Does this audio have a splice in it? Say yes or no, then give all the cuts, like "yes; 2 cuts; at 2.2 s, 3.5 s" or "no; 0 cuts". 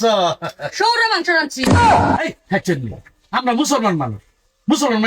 yes; 2 cuts; at 1.6 s, 2.3 s